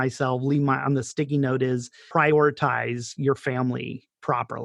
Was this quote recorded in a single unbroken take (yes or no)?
no